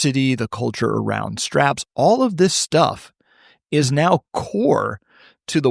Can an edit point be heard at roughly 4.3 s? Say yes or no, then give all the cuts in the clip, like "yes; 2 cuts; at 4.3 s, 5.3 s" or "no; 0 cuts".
yes; 1 cut; at 4.3 s